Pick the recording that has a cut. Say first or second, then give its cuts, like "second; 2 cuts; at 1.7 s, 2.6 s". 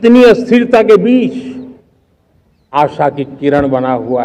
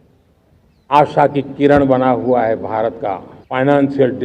second; 1 cut; at 3.3 s